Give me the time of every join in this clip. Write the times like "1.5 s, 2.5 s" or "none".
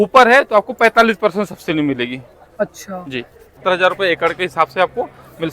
3.6 s